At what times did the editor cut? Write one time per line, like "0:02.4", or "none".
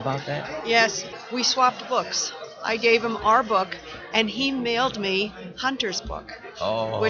0:01.1